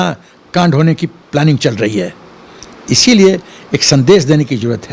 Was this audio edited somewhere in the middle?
no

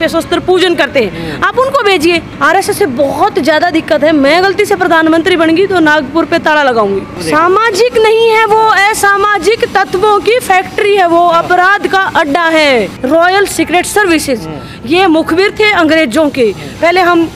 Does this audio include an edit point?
yes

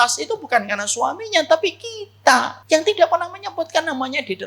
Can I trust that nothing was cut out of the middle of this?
no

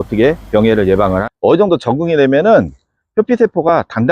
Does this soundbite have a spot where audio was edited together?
yes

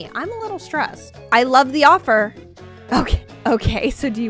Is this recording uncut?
yes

